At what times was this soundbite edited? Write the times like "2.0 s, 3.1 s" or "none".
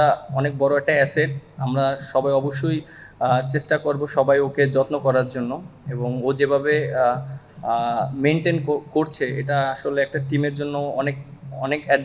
none